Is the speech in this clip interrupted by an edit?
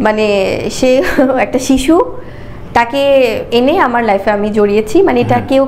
no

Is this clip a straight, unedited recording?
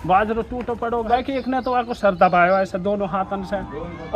no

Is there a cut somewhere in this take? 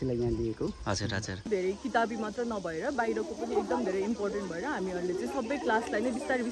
yes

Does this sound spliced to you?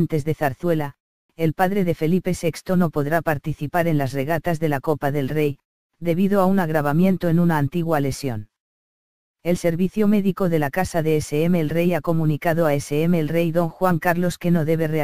yes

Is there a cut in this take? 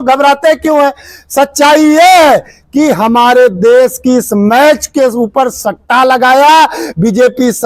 no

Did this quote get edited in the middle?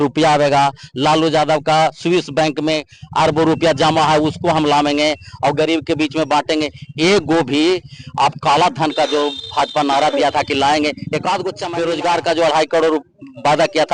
yes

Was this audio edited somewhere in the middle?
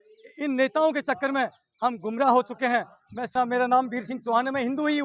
yes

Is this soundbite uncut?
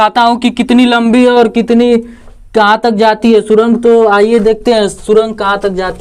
yes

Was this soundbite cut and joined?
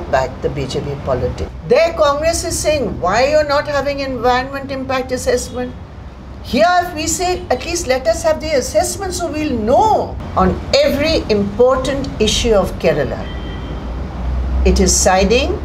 yes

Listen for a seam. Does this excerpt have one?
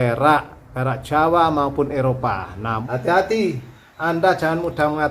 yes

